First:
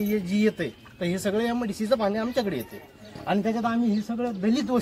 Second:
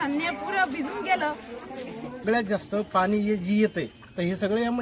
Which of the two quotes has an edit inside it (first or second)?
second